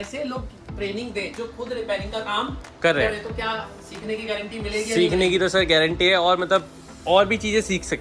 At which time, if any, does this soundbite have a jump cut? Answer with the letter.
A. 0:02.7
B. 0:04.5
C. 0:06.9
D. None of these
D